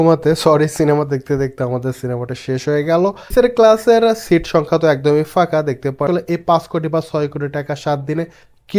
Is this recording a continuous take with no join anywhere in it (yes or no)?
no